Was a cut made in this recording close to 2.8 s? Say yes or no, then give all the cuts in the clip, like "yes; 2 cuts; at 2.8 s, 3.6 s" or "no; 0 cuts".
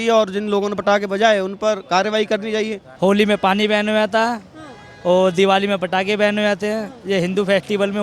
yes; 1 cut; at 2.8 s